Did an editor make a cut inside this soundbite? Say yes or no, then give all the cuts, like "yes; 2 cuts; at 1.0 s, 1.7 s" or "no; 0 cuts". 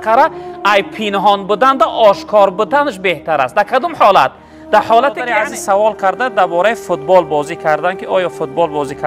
yes; 1 cut; at 5.3 s